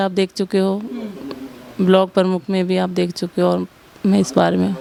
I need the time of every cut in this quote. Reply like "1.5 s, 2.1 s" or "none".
none